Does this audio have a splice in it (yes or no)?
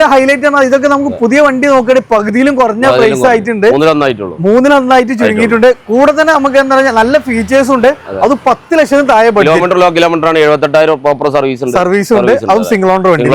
no